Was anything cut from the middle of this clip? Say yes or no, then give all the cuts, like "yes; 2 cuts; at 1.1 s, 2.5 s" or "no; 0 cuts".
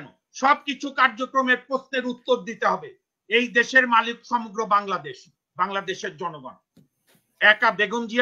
no; 0 cuts